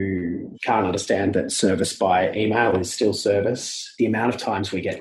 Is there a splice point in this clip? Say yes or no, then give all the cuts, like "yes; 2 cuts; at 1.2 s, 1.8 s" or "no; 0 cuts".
yes; 1 cut; at 3.9 s